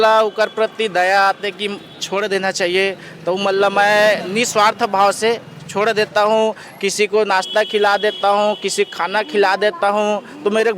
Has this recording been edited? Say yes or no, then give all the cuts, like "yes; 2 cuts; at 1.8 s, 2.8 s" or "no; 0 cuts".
no; 0 cuts